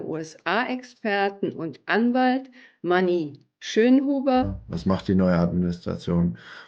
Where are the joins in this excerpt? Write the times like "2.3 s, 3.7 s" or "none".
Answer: 4.6 s